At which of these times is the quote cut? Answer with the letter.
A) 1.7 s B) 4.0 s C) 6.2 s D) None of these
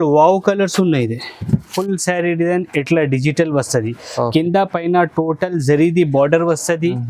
A